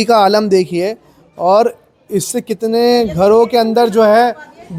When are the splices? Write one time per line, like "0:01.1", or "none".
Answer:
none